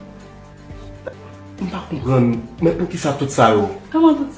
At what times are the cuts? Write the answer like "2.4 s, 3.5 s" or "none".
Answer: 1.1 s